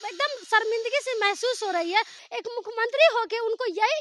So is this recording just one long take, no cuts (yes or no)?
no